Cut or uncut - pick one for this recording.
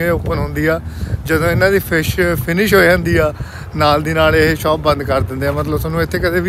uncut